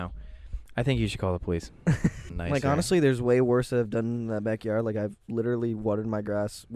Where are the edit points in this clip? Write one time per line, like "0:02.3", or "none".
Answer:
0:02.3